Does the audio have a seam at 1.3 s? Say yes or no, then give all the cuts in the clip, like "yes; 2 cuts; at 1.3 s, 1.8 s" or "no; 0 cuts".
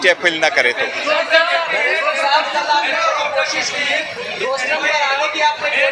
yes; 1 cut; at 1.3 s